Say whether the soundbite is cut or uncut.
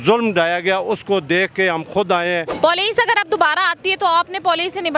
cut